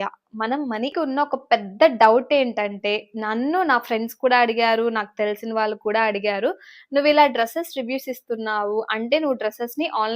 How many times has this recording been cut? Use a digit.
1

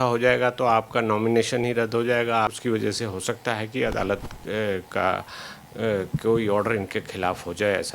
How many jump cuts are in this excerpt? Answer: 1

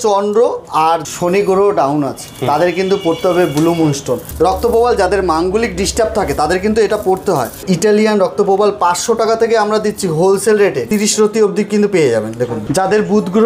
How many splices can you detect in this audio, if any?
5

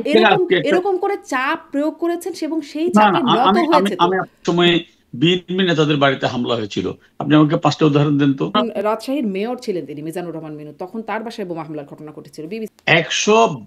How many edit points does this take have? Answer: 3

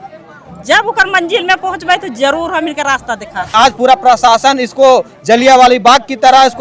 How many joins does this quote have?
1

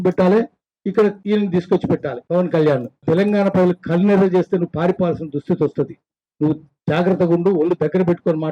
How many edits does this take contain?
3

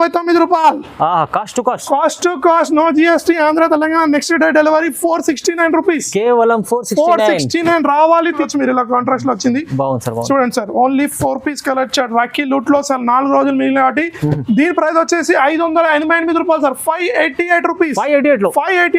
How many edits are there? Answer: 1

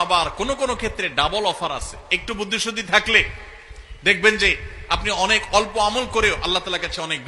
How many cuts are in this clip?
0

